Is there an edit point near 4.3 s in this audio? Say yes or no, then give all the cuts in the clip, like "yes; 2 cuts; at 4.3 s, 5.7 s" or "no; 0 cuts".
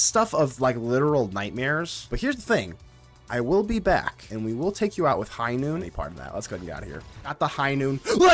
yes; 4 cuts; at 2.0 s, 4.3 s, 5.9 s, 7.3 s